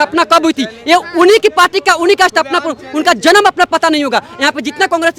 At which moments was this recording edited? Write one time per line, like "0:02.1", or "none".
none